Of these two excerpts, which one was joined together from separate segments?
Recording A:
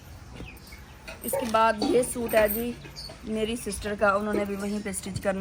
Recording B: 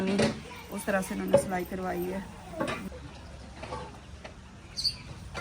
B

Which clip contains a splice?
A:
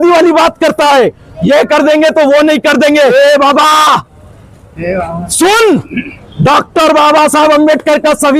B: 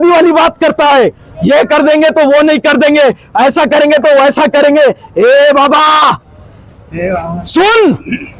A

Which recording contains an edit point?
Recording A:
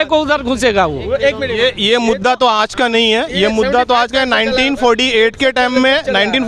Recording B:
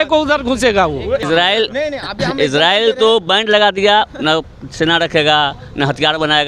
B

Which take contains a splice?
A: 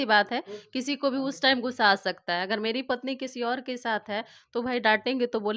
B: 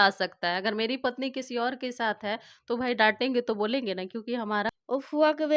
B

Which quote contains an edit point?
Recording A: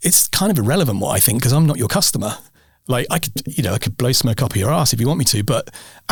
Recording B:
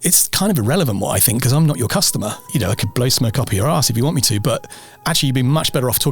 B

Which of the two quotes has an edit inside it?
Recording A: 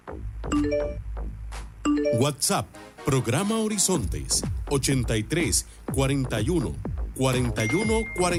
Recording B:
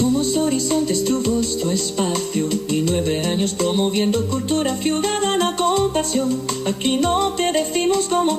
B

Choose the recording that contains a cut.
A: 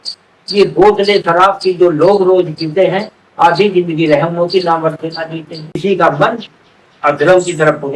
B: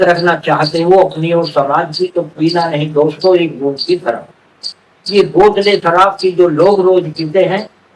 A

